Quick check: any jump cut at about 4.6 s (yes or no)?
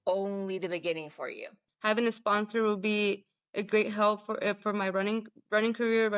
no